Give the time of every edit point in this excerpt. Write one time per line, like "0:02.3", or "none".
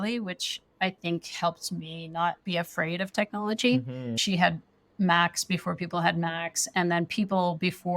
0:04.2